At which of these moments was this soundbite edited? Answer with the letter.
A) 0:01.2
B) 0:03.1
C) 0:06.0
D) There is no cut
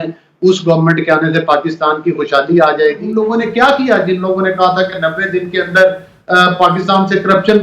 B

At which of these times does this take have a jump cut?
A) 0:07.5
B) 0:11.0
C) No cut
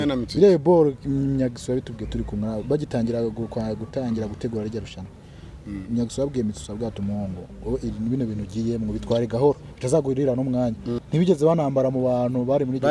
B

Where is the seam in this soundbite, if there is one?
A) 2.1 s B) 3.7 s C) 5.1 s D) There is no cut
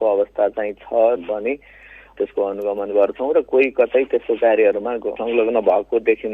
C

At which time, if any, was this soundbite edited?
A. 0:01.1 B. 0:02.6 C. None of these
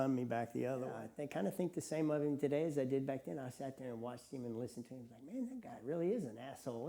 A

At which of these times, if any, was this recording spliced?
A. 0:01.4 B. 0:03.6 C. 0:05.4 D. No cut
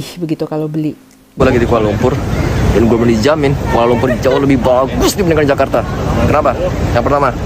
A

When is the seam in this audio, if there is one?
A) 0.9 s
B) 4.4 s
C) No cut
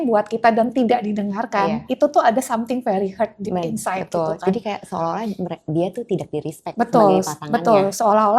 C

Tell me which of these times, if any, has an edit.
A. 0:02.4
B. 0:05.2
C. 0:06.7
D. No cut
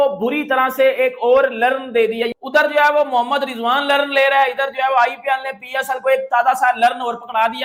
D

